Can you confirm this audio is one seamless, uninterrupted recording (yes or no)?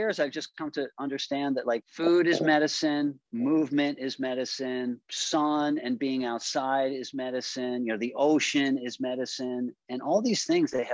yes